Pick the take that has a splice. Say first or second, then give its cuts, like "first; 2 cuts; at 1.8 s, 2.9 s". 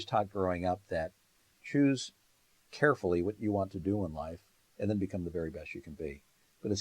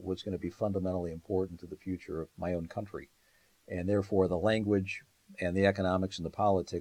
first; 1 cut; at 1.2 s